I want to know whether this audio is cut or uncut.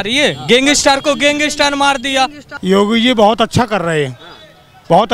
cut